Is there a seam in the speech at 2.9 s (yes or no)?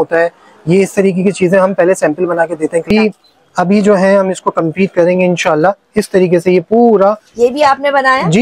yes